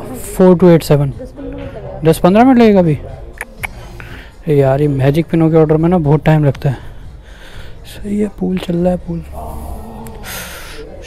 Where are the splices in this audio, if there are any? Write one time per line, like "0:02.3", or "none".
none